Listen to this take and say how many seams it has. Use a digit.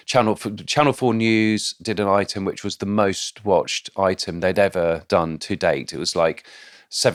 0